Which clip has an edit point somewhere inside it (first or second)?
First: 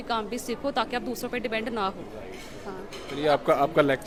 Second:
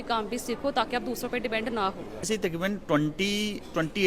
second